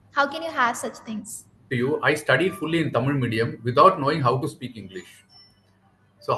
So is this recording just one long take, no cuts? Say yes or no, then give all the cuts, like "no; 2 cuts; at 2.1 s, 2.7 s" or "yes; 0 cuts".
no; 1 cut; at 1.7 s